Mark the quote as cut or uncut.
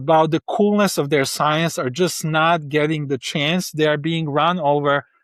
uncut